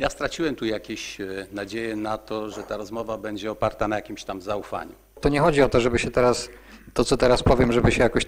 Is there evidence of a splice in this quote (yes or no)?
yes